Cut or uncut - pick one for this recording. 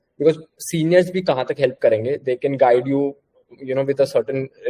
uncut